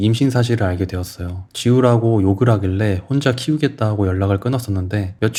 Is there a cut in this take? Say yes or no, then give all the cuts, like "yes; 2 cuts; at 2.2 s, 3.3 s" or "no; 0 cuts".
no; 0 cuts